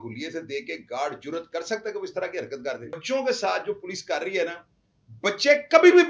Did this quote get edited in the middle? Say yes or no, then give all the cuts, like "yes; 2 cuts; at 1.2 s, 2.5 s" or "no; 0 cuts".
yes; 1 cut; at 3.0 s